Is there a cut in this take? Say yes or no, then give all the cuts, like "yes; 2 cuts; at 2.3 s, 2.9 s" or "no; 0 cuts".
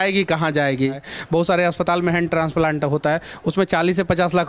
yes; 1 cut; at 1.1 s